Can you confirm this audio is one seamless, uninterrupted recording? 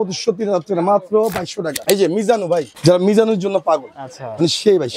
no; 2 cuts; at 1.8 s, 2.7 s

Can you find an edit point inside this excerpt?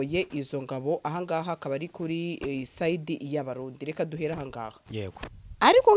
no; 0 cuts

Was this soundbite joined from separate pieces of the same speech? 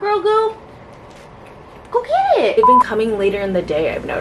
yes; 1 cut; at 2.6 s

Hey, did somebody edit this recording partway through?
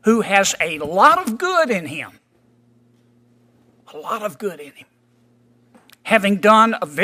no; 0 cuts

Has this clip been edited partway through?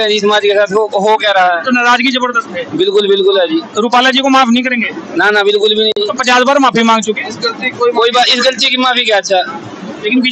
no; 0 cuts

